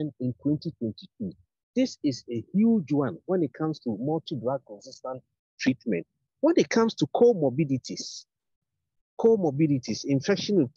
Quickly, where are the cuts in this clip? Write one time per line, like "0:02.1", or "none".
none

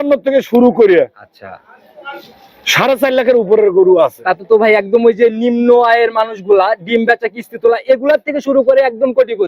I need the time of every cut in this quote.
none

